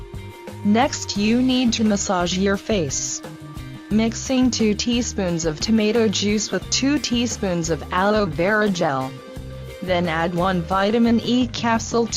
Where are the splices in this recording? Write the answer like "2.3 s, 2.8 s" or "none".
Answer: 1.9 s